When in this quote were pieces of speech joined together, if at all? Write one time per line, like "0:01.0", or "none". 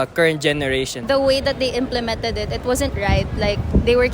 0:01.0